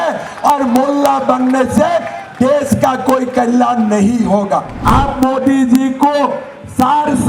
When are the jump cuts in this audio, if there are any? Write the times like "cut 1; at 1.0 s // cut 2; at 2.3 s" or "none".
cut 1; at 4.7 s